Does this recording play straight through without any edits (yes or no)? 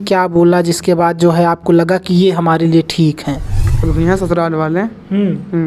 no